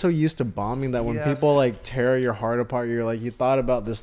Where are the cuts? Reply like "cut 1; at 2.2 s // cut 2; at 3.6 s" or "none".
none